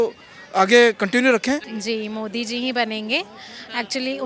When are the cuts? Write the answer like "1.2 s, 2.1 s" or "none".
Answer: 1.7 s